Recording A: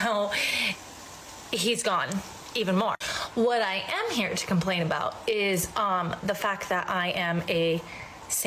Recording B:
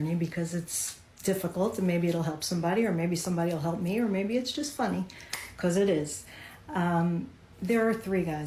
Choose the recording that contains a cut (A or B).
A